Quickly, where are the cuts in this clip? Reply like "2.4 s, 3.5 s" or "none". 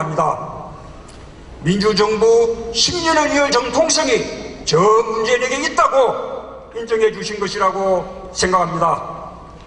5.5 s